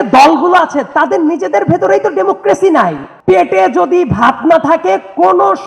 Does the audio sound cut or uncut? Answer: cut